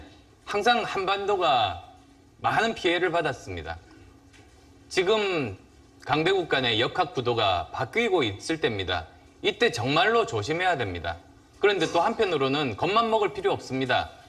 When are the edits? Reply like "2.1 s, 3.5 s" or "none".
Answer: 10.3 s